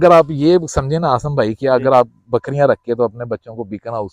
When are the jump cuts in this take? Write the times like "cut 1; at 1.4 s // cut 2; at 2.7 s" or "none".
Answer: none